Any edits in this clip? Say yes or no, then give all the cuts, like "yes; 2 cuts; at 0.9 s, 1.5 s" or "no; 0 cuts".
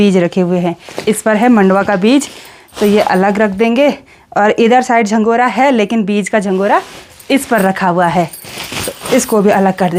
no; 0 cuts